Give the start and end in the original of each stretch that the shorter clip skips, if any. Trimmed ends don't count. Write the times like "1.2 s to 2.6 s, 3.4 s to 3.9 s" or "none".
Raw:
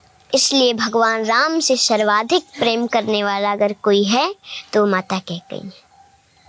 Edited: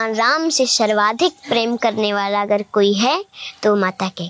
none